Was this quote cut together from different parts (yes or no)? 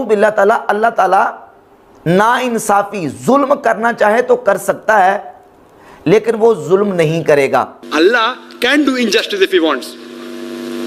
no